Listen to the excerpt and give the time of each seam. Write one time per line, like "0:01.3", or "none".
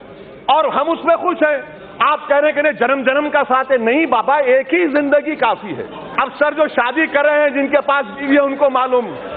0:06.1